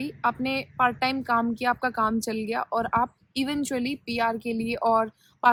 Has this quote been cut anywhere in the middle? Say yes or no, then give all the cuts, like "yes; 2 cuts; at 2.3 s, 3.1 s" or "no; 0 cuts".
no; 0 cuts